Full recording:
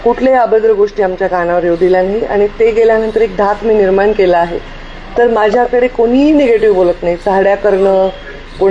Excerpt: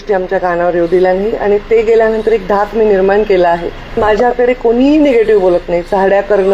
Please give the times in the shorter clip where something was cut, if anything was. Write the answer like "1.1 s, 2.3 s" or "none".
4.0 s